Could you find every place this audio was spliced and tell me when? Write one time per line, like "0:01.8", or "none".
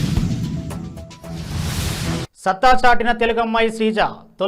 0:02.3